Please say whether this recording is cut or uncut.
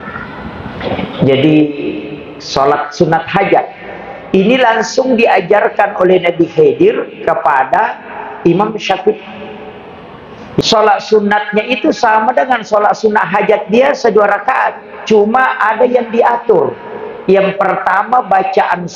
cut